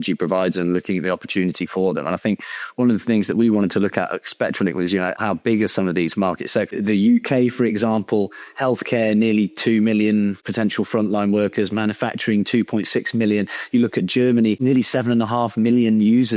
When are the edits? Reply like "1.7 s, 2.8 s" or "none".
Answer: 5.2 s, 6.8 s, 10.4 s, 14.6 s